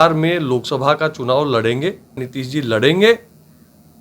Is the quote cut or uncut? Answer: cut